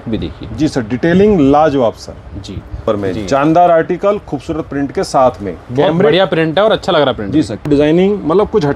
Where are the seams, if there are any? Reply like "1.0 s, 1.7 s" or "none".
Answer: 2.8 s, 7.7 s

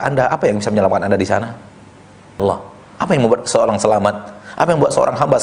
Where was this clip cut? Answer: 2.4 s

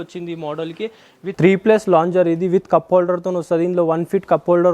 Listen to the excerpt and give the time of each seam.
1.2 s

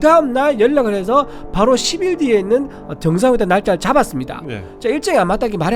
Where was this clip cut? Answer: none

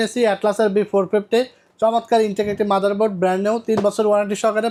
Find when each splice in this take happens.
none

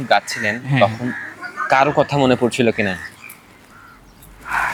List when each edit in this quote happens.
none

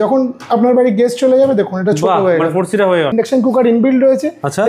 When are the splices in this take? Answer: 3.1 s

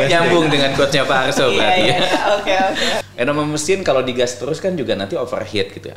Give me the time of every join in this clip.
3.0 s

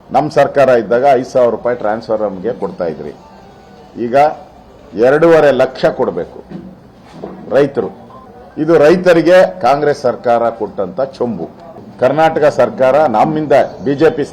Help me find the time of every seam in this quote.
7.6 s

